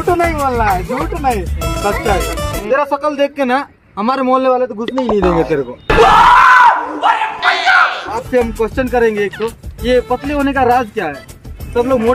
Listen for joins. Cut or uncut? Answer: cut